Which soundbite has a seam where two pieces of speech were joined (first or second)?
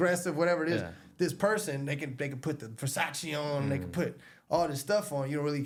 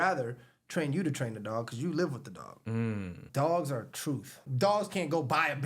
second